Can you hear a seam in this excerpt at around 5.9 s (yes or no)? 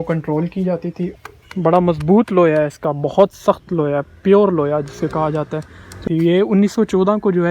yes